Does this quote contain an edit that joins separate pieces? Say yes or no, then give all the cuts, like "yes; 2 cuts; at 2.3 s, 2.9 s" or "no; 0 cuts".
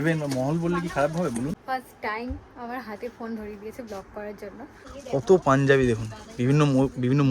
yes; 2 cuts; at 1.6 s, 4.9 s